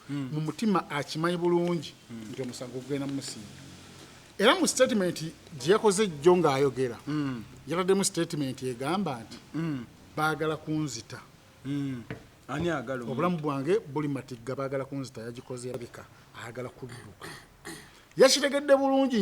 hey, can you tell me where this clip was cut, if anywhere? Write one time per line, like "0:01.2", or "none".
0:15.7